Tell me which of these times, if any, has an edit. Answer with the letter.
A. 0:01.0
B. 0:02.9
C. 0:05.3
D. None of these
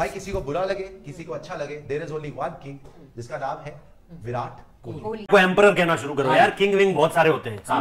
C